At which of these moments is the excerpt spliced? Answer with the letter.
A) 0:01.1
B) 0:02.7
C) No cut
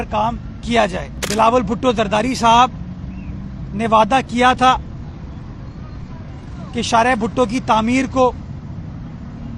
A